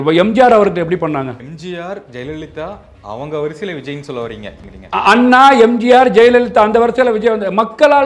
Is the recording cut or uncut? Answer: cut